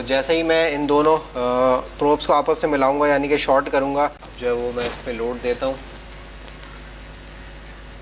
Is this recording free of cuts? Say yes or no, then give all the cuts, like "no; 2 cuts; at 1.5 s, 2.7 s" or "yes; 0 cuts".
no; 1 cut; at 4.3 s